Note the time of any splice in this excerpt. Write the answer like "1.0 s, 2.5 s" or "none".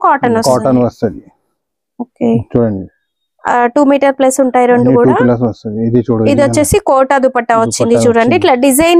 none